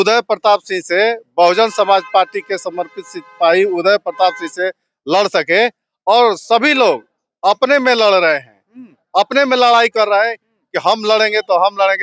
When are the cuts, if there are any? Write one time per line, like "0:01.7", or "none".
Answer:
none